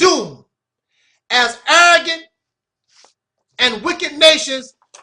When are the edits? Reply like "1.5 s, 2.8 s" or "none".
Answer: 4.1 s